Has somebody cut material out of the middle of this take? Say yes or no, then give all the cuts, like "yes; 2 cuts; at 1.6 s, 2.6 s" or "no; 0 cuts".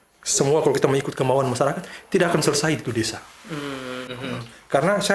yes; 1 cut; at 4.1 s